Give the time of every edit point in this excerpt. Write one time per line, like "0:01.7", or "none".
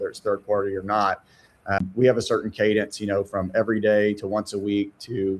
0:01.8